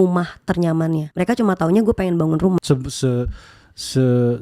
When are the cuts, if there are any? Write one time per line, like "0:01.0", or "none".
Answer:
0:01.1
0:02.6